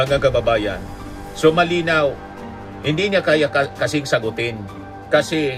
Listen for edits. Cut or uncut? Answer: uncut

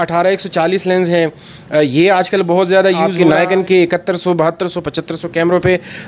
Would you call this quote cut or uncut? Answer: cut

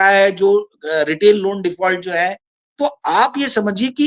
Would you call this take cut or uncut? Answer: uncut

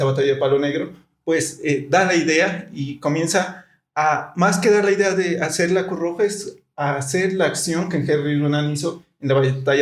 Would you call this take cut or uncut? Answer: uncut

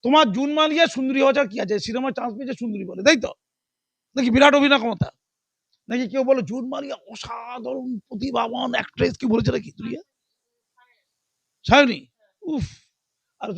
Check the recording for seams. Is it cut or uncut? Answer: uncut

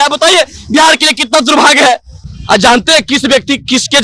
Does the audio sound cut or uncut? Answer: uncut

